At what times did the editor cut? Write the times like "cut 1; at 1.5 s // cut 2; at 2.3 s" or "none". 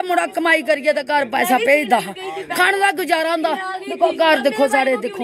none